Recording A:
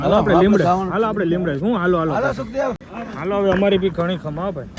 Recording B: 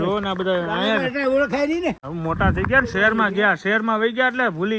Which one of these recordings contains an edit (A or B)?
B